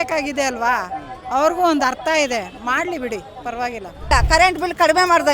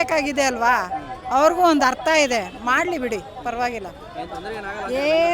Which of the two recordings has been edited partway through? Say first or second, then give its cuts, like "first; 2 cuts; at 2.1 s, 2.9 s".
first; 1 cut; at 4.1 s